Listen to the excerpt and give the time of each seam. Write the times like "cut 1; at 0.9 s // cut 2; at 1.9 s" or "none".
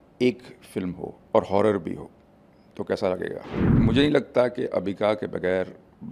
cut 1; at 1.1 s // cut 2; at 3.6 s